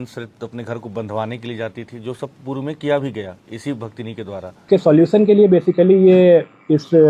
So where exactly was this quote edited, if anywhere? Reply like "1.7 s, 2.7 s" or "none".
4.6 s